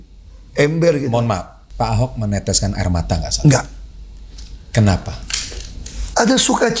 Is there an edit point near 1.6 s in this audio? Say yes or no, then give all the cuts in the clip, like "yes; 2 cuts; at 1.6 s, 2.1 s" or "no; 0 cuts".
yes; 1 cut; at 1.6 s